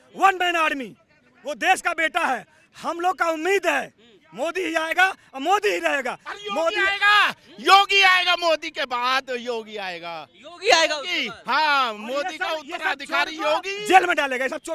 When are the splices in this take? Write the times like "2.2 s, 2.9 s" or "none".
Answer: none